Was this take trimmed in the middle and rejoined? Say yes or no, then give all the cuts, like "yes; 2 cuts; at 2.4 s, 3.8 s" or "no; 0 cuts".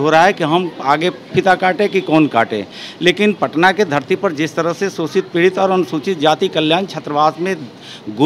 no; 0 cuts